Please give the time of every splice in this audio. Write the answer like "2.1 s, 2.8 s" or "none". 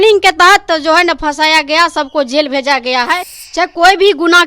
3.4 s